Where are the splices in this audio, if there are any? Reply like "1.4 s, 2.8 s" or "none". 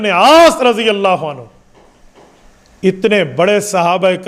none